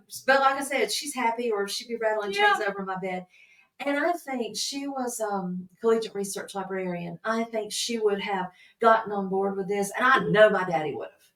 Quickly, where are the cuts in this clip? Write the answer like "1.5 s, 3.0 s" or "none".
none